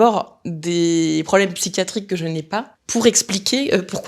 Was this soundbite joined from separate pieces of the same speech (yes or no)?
yes